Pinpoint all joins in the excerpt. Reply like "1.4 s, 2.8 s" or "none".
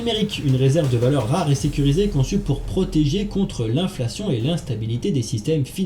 none